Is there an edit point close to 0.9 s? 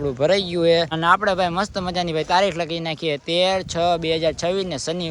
yes; 1 cut; at 0.9 s

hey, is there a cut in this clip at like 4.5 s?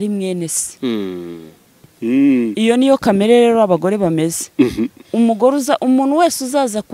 no; 1 cut; at 1.8 s

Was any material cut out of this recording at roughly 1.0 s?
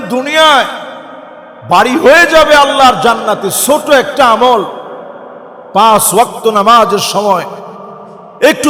no; 0 cuts

